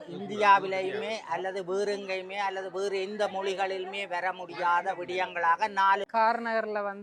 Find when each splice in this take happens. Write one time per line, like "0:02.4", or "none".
0:06.1